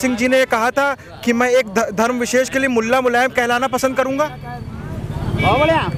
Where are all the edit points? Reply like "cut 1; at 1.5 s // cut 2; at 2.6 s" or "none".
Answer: none